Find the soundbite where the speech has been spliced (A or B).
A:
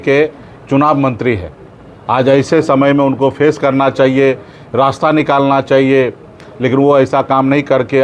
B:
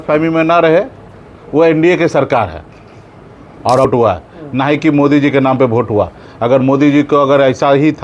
B